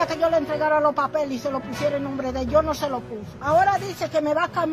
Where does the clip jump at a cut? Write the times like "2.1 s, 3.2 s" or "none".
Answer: 3.3 s

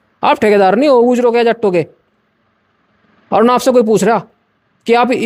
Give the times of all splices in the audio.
none

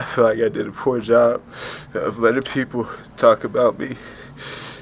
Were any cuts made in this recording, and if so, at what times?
none

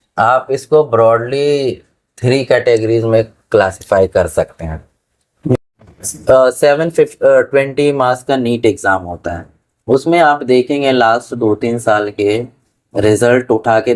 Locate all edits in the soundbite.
5.5 s

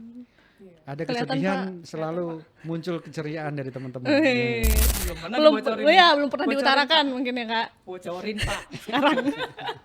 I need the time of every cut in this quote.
4.8 s

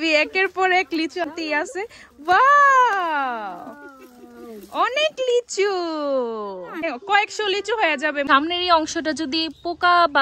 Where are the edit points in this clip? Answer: 1.3 s, 6.8 s, 8.3 s

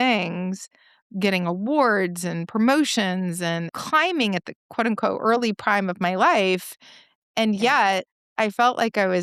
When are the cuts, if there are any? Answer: none

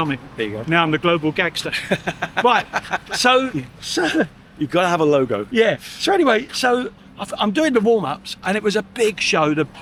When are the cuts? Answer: none

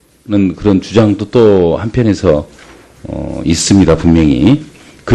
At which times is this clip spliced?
1.6 s

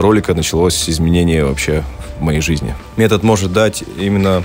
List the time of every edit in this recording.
2.8 s

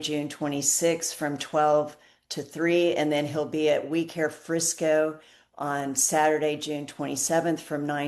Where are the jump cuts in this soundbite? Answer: none

